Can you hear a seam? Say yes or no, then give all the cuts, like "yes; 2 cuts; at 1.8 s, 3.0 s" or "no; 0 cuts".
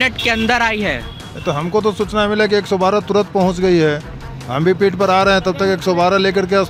no; 0 cuts